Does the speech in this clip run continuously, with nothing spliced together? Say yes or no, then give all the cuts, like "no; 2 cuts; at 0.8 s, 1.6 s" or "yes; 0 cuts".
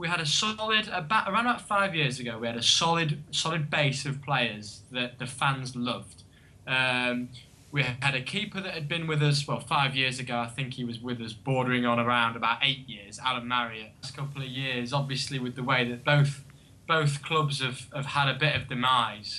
yes; 0 cuts